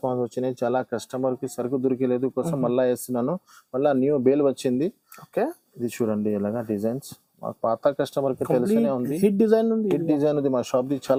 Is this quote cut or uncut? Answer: uncut